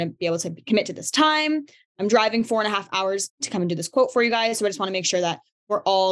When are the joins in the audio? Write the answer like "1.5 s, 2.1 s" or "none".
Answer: 1.9 s, 3.4 s